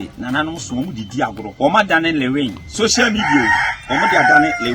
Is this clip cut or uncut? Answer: cut